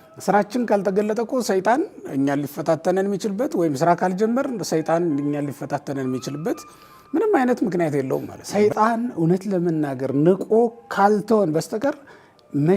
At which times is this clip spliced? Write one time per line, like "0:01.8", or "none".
0:08.4

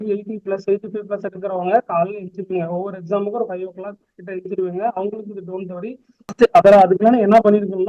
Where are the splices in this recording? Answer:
0:06.3

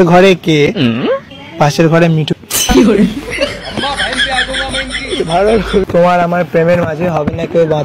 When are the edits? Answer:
0:02.3
0:05.8

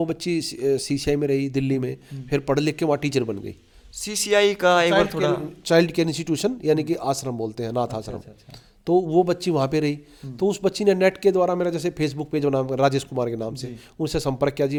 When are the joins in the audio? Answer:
none

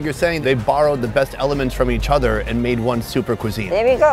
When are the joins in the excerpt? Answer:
none

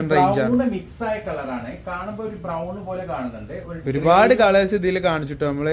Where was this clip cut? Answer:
none

